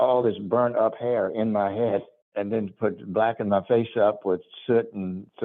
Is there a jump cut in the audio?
no; 0 cuts

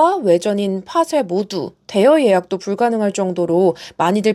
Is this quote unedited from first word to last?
yes; 0 cuts

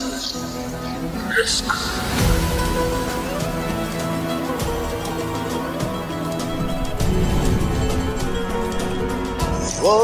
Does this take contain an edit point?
yes; 1 cut; at 1.1 s

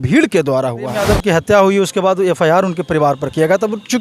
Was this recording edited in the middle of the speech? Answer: yes; 1 cut; at 1.0 s

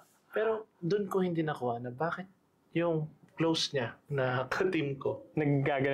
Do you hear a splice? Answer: yes; 1 cut; at 3.2 s

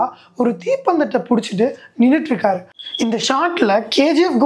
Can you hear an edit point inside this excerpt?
yes; 1 cut; at 2.6 s

